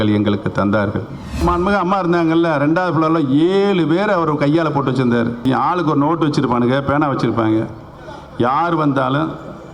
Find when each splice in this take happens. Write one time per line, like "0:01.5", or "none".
0:01.4
0:05.4